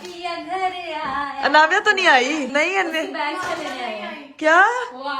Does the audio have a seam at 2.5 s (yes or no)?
yes